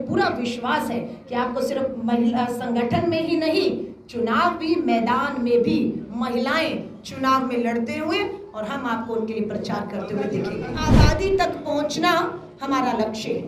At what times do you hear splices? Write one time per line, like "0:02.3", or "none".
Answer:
0:10.9